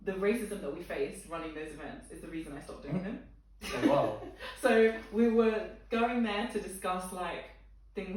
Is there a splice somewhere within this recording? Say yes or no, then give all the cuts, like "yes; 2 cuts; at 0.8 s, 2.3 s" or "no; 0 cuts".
no; 0 cuts